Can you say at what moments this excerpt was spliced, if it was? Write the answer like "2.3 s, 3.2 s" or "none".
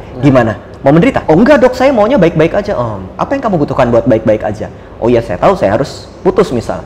1.2 s